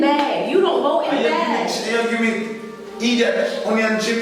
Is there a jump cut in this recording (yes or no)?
no